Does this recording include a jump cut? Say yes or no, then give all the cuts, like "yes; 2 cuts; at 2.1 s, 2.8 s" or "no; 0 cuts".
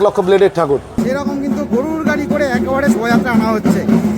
yes; 1 cut; at 1.0 s